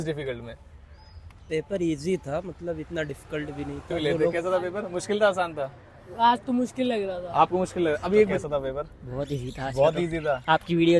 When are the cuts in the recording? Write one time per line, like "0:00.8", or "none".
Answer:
0:04.1
0:08.4